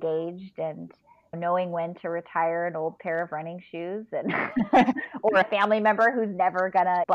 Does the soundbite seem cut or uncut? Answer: uncut